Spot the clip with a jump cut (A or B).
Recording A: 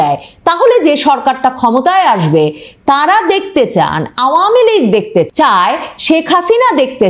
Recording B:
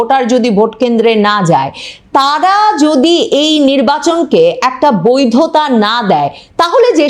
A